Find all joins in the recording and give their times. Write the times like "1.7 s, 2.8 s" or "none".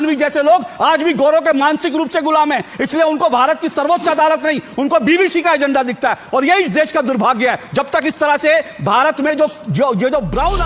none